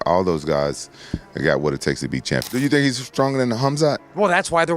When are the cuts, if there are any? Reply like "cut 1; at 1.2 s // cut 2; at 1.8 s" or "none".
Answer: cut 1; at 2.5 s